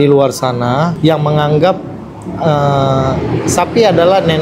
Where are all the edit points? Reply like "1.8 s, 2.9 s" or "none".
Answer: 0.9 s